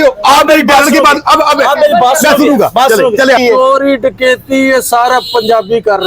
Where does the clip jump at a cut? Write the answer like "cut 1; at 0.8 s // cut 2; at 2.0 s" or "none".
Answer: cut 1; at 3.4 s